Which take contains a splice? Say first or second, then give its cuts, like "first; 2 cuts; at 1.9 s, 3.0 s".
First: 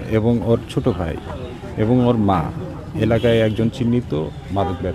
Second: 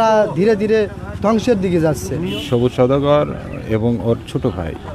second; 1 cut; at 2.2 s